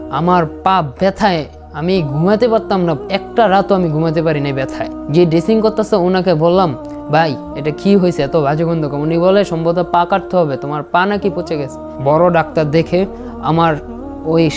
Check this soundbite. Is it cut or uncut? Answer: cut